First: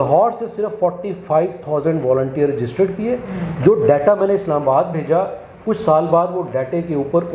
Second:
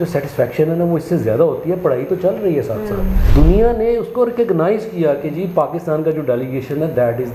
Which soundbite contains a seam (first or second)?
second